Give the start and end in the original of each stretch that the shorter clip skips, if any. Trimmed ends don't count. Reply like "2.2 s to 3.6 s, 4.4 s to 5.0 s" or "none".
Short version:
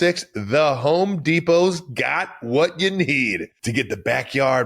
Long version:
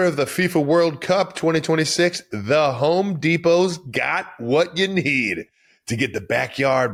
5.5 s to 5.8 s